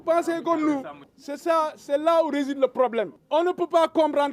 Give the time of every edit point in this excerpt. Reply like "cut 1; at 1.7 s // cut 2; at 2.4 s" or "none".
cut 1; at 1.0 s // cut 2; at 3.2 s